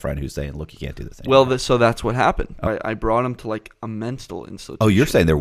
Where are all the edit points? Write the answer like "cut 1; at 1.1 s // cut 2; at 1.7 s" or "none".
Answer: cut 1; at 2.7 s